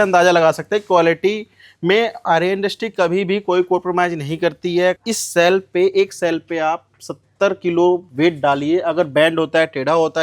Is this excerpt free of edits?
no; 1 cut; at 5.0 s

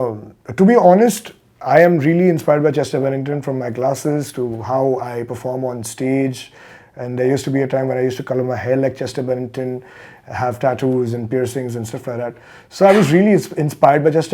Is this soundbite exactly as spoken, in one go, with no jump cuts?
yes; 0 cuts

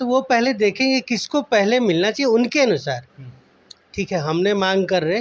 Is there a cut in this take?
no; 0 cuts

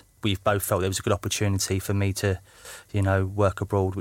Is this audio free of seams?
yes; 0 cuts

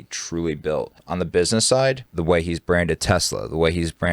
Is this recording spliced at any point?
yes; 2 cuts; at 1.0 s, 2.1 s

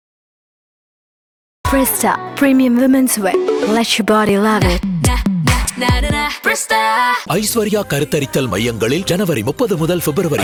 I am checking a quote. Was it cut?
no; 0 cuts

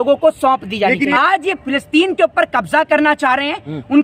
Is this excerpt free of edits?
no; 1 cut; at 1.1 s

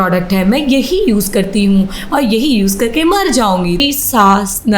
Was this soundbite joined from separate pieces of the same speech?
yes; 1 cut; at 3.8 s

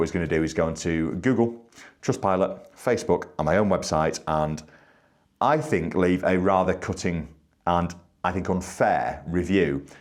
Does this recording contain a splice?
no; 0 cuts

